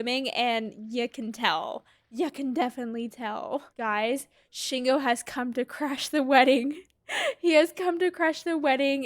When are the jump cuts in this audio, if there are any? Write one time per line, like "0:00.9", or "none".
0:03.7